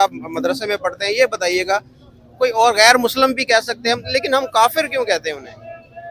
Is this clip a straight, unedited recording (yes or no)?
yes